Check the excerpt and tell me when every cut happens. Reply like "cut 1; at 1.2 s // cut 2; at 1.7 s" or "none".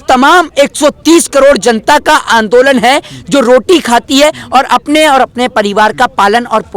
none

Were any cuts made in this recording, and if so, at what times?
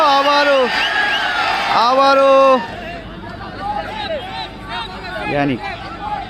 cut 1; at 2.7 s

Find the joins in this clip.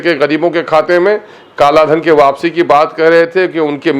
none

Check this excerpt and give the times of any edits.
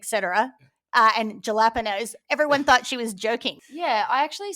cut 1; at 3.6 s

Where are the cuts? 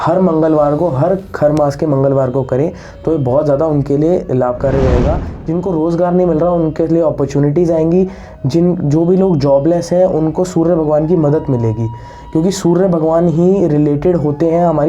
cut 1; at 5.3 s

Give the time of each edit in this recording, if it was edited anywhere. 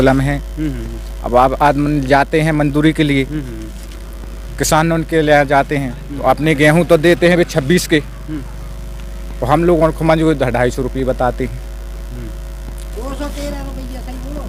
none

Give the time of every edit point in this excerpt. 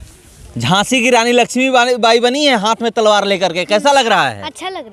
none

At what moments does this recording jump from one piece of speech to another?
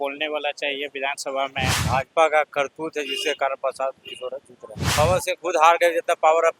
cut 1; at 1.8 s // cut 2; at 4.8 s

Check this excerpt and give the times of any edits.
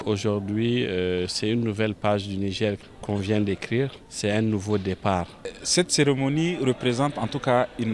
cut 1; at 2.9 s // cut 2; at 4.0 s // cut 3; at 5.6 s

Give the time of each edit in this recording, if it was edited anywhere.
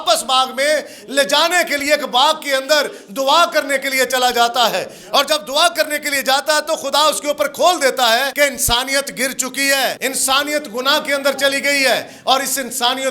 cut 1; at 8.3 s // cut 2; at 10.0 s

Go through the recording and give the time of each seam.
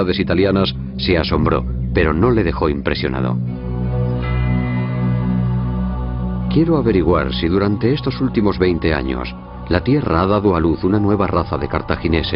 cut 1; at 6.4 s

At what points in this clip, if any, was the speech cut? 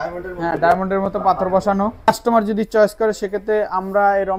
cut 1; at 2.1 s

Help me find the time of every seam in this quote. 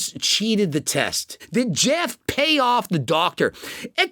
cut 1; at 1.4 s

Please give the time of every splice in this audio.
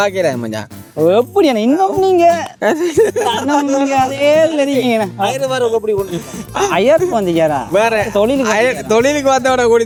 none

